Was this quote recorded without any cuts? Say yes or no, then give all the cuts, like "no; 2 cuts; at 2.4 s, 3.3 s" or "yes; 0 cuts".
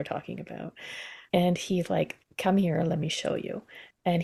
yes; 0 cuts